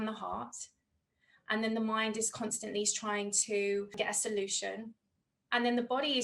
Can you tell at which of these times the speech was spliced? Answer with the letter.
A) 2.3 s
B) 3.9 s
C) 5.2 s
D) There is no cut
B